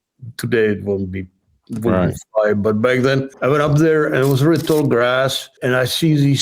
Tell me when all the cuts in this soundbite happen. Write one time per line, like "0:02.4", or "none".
0:03.3
0:05.5